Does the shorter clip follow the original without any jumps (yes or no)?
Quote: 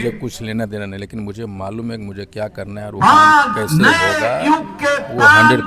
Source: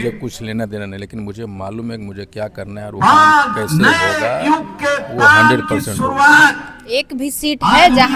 yes